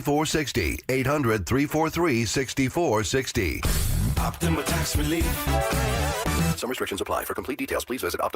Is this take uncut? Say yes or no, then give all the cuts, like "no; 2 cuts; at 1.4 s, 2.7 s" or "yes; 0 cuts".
no; 1 cut; at 2.5 s